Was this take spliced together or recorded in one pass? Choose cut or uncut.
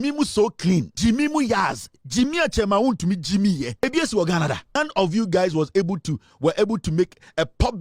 cut